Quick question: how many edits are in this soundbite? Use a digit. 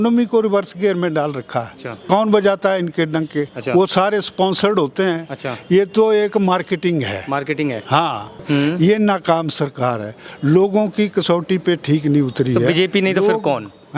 2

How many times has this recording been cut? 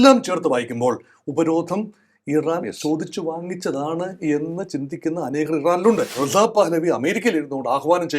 1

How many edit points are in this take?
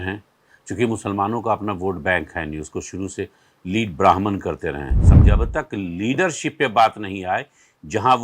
1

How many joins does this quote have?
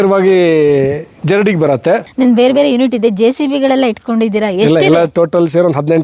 1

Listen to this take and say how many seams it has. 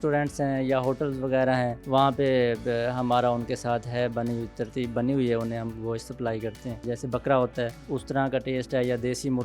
3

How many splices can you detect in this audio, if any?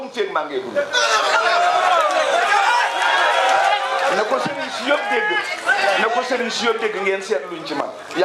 0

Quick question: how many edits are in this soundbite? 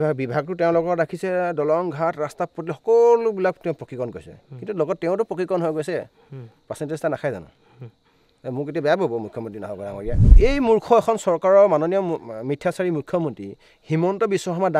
1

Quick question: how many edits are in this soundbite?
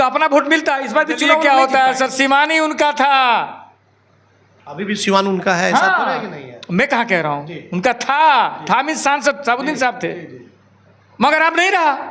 1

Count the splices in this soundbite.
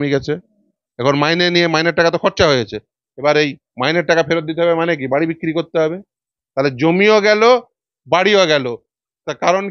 0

